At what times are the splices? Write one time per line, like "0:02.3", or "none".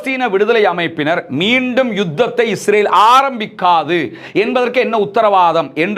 none